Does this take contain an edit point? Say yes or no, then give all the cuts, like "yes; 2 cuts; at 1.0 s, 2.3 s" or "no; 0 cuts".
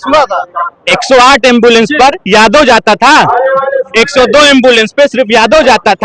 no; 0 cuts